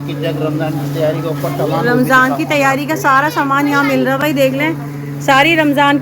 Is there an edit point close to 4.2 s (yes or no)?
no